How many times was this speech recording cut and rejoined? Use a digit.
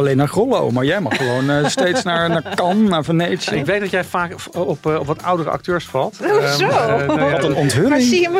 1